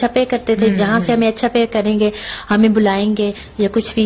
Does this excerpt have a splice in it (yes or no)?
no